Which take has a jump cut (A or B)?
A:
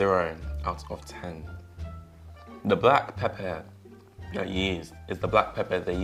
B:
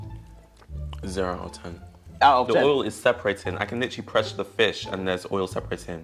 B